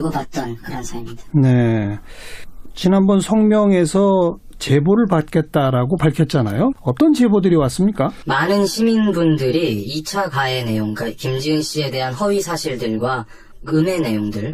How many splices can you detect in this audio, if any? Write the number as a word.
one